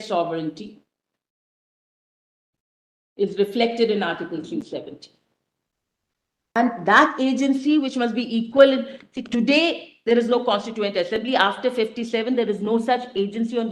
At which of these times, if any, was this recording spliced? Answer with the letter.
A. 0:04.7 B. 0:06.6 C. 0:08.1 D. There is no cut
B